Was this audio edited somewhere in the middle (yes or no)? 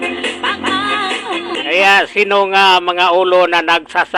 yes